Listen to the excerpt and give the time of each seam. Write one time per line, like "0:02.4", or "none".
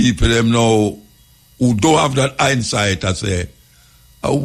none